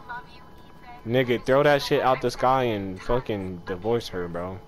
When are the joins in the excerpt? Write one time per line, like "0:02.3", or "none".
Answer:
none